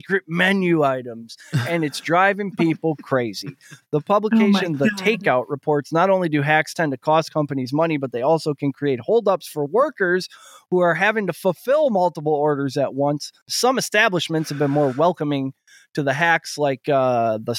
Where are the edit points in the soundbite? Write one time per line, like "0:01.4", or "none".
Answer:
0:13.4